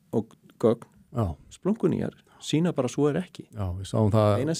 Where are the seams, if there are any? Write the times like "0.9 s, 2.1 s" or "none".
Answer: none